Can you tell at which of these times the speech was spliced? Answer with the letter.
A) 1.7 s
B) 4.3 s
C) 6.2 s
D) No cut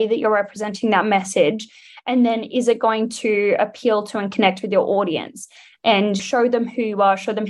C